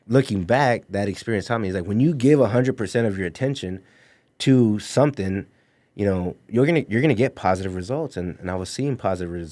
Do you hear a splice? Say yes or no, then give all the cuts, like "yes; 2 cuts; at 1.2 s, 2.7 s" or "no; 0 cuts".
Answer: no; 0 cuts